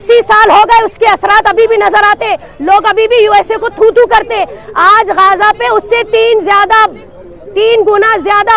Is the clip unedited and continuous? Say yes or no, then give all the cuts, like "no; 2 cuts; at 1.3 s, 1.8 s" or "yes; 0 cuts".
yes; 0 cuts